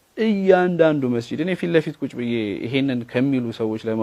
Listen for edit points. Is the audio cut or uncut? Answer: uncut